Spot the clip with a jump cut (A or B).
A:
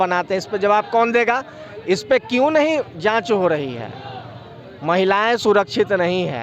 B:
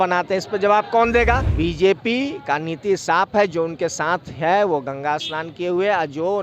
B